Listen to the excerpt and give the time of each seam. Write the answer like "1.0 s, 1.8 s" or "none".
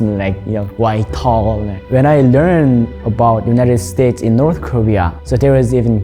1.8 s, 5.2 s